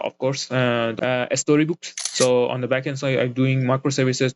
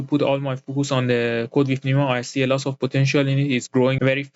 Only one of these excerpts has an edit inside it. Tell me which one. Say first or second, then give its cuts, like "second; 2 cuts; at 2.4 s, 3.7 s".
first; 2 cuts; at 0.9 s, 2.0 s